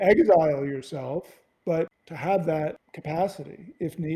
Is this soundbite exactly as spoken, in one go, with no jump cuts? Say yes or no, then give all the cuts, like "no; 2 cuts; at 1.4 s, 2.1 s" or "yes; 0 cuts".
yes; 0 cuts